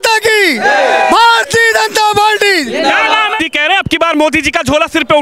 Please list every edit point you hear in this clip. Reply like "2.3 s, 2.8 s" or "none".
3.4 s